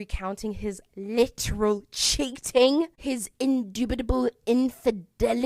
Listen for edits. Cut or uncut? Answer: uncut